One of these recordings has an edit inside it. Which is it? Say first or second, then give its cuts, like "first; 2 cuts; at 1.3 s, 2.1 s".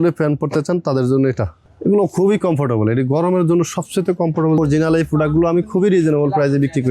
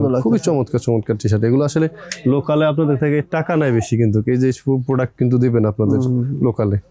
first; 2 cuts; at 1.6 s, 4.6 s